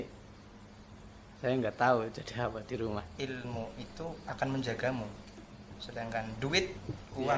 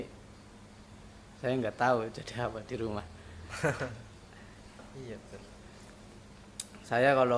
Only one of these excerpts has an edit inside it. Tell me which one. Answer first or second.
first